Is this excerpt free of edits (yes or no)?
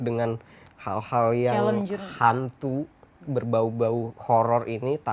yes